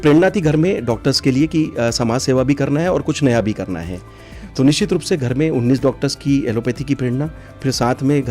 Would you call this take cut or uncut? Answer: uncut